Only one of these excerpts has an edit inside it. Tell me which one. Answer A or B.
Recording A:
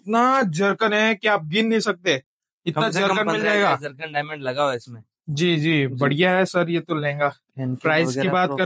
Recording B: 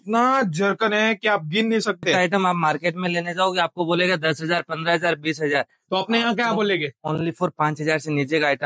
B